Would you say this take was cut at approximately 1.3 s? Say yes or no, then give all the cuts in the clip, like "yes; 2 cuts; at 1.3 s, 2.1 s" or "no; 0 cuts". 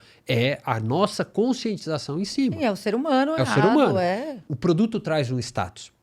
no; 1 cut; at 4.4 s